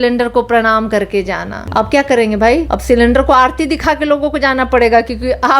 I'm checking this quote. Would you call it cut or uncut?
cut